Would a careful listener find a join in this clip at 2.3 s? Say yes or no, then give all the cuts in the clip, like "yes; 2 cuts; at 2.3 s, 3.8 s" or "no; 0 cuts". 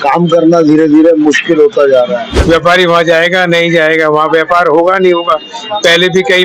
yes; 1 cut; at 2.3 s